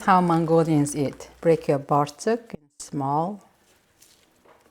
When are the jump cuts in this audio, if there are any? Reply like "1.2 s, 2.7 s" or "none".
1.2 s